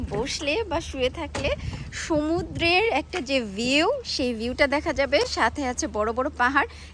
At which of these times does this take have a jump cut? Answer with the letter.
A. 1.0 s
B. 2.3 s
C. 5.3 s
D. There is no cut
D